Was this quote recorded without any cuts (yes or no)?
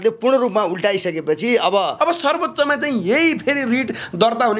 no